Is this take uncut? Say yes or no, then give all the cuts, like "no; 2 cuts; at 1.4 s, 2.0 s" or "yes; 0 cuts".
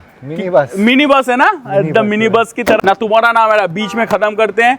no; 1 cut; at 2.8 s